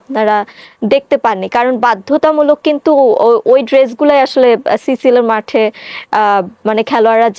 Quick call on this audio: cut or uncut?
uncut